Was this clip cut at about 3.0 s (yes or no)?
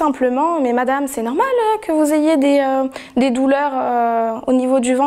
no